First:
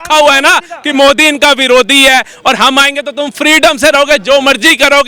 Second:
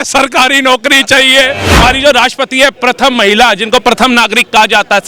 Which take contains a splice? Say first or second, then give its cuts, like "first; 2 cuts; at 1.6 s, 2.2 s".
second; 1 cut; at 1.8 s